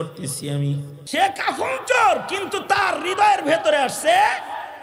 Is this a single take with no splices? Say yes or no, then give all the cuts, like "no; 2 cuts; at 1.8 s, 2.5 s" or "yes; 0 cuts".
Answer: no; 1 cut; at 0.9 s